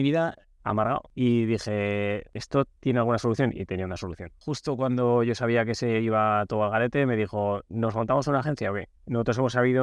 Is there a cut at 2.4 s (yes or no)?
yes